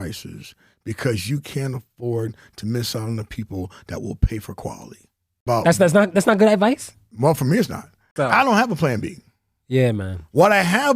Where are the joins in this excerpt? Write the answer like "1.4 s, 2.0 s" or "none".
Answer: 5.4 s, 8.1 s

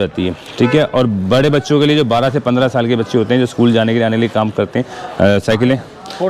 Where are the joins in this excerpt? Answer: none

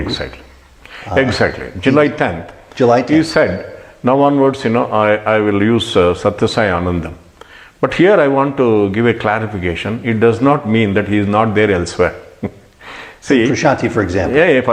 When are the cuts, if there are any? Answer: none

